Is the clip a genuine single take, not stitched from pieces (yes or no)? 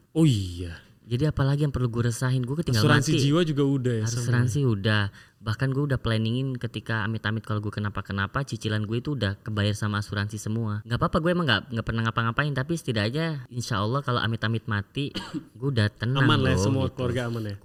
yes